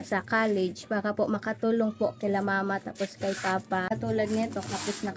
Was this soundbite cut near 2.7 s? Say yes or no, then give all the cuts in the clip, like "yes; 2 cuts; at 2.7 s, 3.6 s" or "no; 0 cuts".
no; 1 cut; at 3.9 s